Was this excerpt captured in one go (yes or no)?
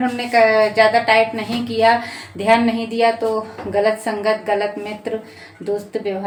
yes